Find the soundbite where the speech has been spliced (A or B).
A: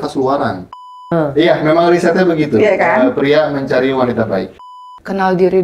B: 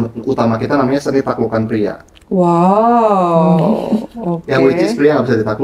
A